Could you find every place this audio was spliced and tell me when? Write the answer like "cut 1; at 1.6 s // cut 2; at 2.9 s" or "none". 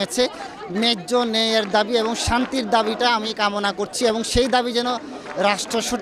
none